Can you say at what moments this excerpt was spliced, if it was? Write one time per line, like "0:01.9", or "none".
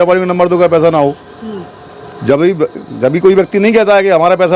none